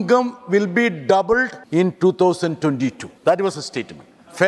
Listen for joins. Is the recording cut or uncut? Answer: cut